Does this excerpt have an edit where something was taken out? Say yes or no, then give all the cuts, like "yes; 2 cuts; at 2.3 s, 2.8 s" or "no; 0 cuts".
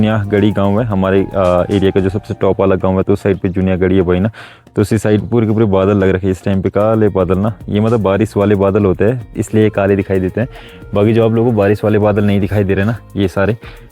no; 0 cuts